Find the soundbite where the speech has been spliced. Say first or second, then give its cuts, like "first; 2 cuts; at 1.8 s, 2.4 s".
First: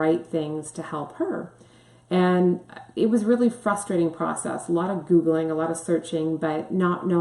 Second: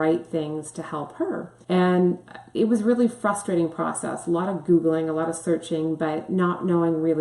second; 1 cut; at 1.5 s